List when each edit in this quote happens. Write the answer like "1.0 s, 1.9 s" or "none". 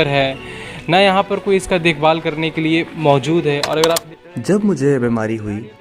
4.0 s